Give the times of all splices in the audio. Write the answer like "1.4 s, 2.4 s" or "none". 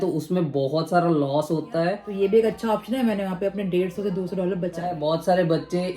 2.0 s, 4.9 s